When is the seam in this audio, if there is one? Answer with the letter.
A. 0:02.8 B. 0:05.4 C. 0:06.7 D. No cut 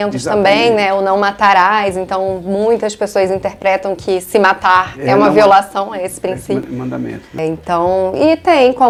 D